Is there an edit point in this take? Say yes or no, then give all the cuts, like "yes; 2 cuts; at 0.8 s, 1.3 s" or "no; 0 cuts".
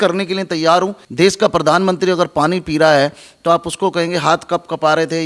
yes; 1 cut; at 1.0 s